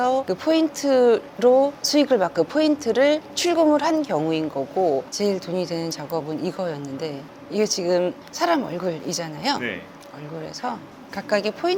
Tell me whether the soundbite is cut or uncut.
cut